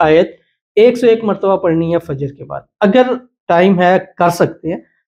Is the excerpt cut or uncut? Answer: uncut